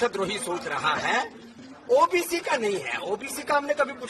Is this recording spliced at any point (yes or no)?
yes